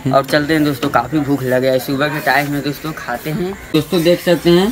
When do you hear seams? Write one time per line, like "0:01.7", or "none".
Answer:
0:03.7